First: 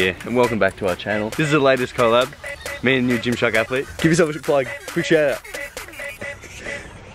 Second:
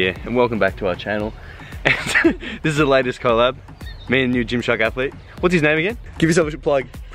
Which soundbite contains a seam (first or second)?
first